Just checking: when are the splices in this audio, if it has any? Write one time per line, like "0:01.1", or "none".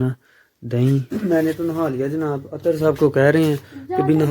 0:01.1